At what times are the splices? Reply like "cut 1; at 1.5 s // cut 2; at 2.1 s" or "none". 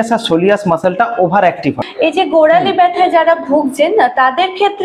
cut 1; at 1.9 s